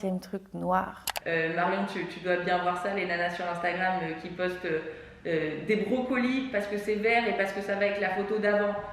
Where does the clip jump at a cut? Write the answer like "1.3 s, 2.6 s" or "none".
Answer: 1.1 s